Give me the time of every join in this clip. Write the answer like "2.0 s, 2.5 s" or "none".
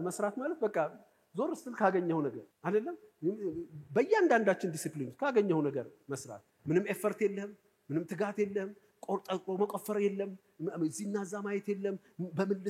2.5 s

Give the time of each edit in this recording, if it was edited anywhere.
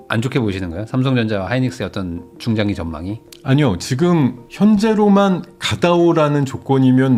none

